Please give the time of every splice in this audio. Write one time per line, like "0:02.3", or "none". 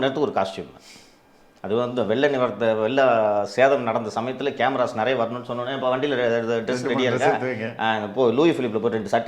none